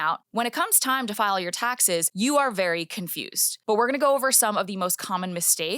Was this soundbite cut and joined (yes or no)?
yes